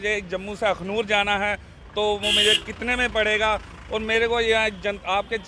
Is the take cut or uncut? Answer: uncut